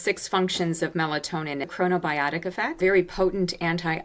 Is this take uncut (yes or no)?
no